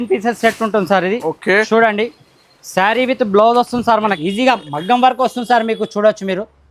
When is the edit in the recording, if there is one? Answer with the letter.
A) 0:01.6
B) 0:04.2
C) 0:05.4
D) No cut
B